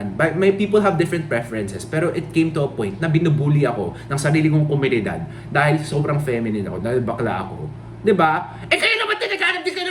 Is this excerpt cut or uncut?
uncut